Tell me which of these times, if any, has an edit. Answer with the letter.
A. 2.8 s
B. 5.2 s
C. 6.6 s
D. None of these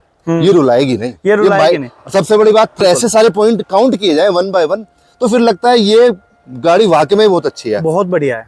A